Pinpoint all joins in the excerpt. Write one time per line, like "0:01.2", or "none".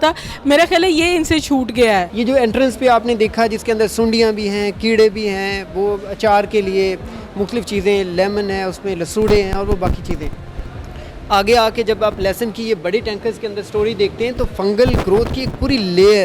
0:02.1